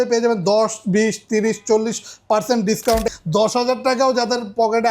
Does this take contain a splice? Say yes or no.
yes